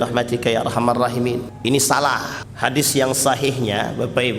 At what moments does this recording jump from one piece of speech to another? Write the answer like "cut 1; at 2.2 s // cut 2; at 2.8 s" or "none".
cut 1; at 1.5 s // cut 2; at 2.4 s